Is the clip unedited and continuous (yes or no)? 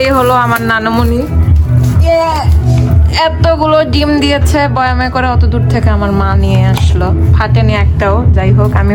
yes